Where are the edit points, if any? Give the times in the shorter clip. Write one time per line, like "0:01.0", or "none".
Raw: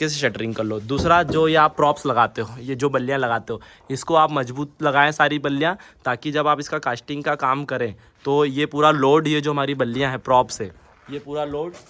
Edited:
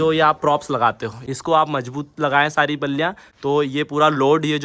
0:01.1
0:03.3